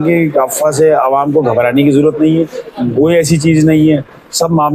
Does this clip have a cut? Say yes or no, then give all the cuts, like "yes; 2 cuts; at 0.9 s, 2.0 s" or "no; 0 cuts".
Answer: no; 0 cuts